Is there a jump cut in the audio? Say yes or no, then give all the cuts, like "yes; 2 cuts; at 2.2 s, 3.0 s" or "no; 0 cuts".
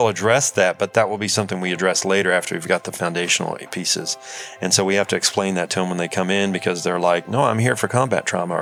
no; 0 cuts